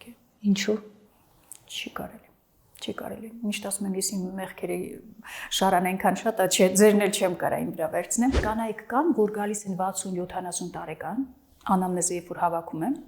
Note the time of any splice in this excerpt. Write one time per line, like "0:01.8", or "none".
0:08.4